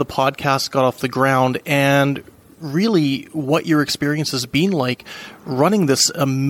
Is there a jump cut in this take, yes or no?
no